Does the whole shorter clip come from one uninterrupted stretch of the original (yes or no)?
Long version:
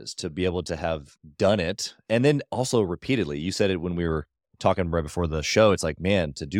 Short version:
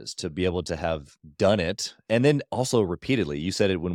yes